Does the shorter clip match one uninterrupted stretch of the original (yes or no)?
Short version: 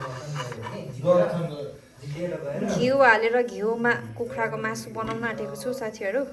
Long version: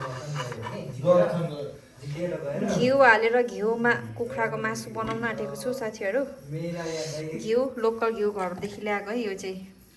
yes